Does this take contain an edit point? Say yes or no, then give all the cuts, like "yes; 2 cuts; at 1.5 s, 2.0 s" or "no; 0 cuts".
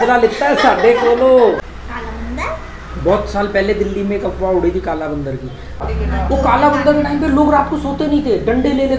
yes; 2 cuts; at 1.6 s, 5.8 s